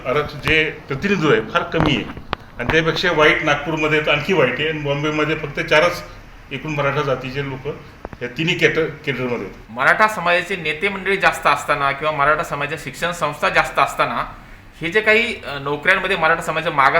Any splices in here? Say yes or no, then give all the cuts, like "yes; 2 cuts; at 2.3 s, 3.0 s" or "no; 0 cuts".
yes; 1 cut; at 9.6 s